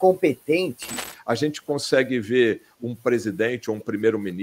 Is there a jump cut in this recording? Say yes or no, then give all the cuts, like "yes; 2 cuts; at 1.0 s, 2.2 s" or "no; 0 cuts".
yes; 1 cut; at 1.1 s